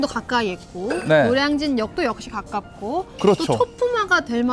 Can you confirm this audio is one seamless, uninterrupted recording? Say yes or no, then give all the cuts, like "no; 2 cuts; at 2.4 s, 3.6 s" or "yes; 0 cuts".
yes; 0 cuts